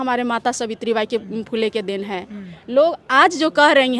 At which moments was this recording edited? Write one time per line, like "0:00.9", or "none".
none

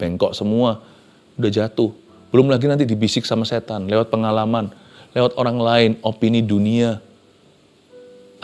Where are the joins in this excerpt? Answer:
none

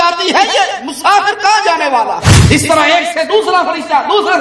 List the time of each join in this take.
0:02.3

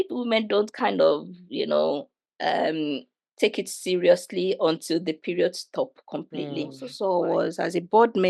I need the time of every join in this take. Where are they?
0:06.9

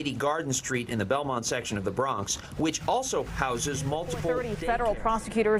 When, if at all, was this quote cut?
0:04.5

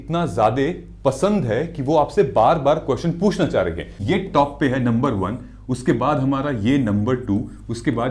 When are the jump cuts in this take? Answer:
0:04.0

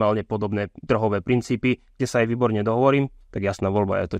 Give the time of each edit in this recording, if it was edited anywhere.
none

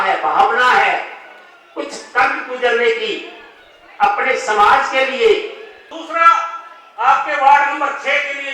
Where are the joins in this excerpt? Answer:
0:05.9

